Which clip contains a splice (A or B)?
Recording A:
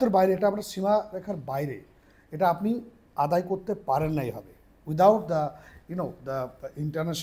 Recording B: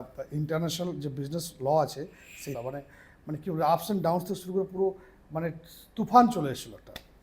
B